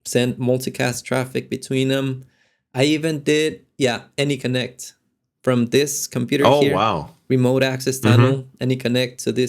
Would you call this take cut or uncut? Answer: uncut